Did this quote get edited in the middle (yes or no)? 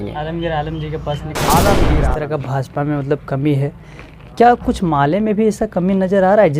yes